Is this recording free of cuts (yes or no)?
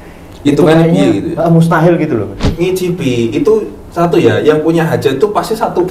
no